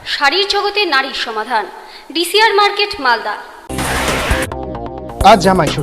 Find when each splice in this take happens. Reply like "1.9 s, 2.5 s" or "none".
3.5 s